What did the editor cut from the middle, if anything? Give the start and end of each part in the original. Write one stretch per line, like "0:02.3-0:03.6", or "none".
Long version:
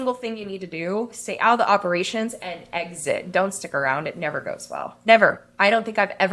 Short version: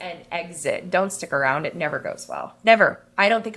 none